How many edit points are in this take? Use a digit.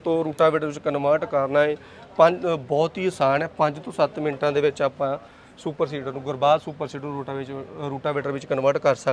0